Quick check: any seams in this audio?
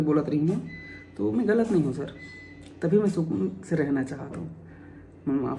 no; 0 cuts

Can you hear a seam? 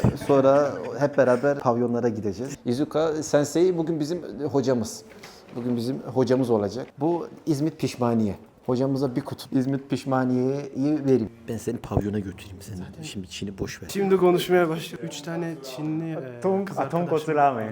yes; 3 cuts; at 2.5 s, 6.9 s, 11.3 s

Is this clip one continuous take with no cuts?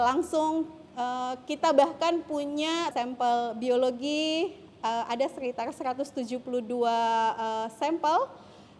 no; 1 cut; at 2.9 s

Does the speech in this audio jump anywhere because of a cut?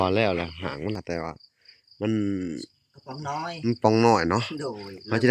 yes; 1 cut; at 1.0 s

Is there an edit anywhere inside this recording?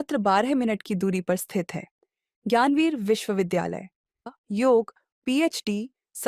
yes; 1 cut; at 4.3 s

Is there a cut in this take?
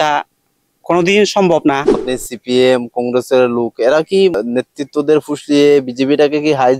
yes; 2 cuts; at 2.1 s, 4.4 s

